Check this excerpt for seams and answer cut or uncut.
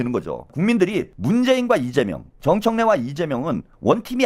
cut